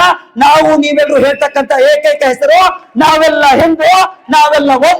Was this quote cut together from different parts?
no; 0 cuts

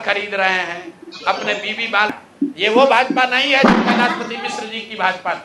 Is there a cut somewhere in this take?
yes; 1 cut; at 2.5 s

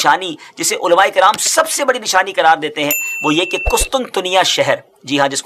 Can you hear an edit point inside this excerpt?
no; 0 cuts

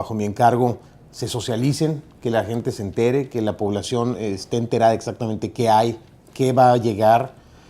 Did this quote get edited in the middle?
yes; 1 cut; at 4.6 s

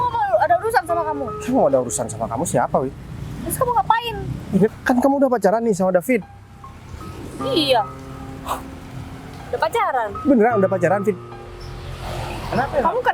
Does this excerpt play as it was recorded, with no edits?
no; 1 cut; at 4.7 s

